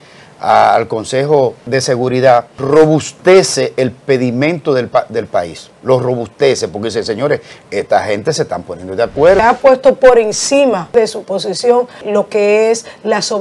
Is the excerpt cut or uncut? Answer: cut